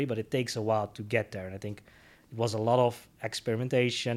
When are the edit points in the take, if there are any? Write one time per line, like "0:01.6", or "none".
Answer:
none